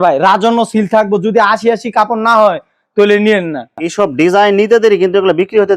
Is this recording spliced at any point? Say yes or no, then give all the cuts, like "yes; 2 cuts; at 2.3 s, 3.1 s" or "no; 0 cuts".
yes; 1 cut; at 3.8 s